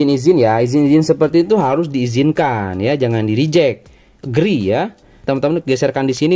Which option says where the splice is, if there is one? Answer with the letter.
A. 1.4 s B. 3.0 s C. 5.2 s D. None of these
C